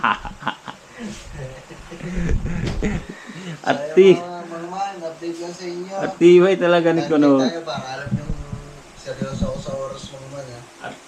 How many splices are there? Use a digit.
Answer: 0